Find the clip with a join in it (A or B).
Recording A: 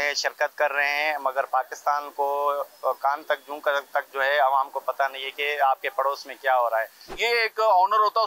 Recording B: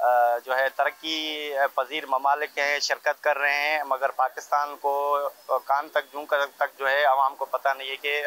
A